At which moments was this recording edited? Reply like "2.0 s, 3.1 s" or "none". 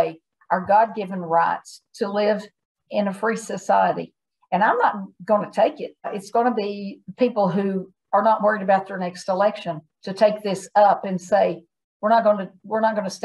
6.1 s